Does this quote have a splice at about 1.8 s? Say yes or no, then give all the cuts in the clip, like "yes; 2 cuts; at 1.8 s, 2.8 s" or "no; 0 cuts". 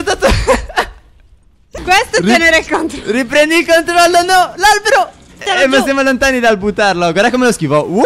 yes; 2 cuts; at 1.8 s, 5.4 s